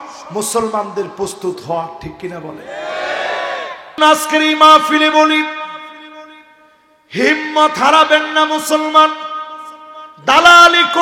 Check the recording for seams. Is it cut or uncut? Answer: cut